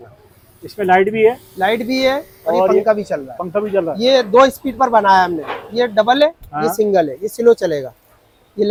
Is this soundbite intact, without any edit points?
yes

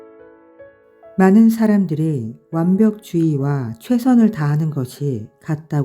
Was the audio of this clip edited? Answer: yes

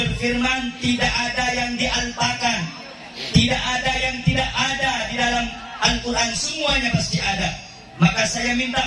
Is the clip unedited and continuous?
yes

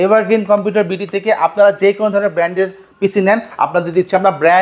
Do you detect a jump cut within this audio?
no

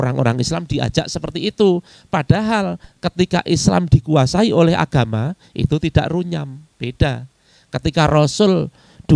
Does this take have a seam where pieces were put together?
yes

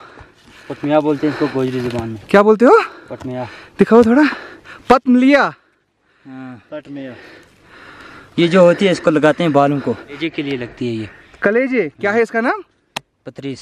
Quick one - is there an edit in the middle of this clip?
yes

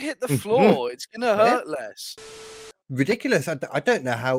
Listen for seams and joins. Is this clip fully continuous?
no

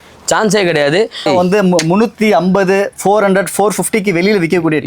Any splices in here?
yes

